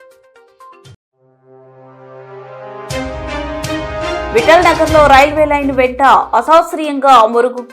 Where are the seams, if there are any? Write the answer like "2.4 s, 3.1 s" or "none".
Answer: none